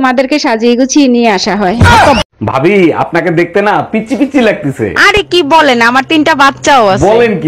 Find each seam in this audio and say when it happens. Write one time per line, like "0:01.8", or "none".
none